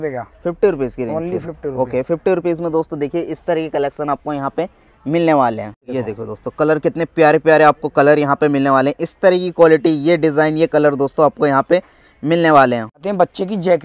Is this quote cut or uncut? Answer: uncut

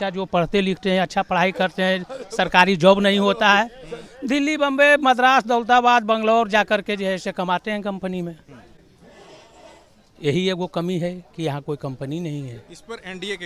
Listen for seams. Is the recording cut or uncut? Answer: uncut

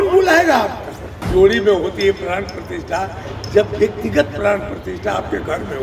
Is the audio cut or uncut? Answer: cut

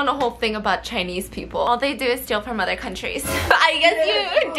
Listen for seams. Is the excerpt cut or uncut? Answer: cut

